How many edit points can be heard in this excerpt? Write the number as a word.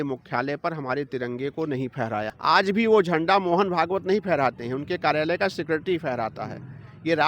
one